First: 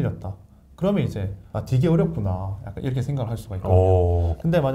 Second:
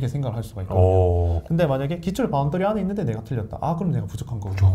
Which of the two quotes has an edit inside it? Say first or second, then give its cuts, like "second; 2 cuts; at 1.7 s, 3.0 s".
first; 1 cut; at 1.4 s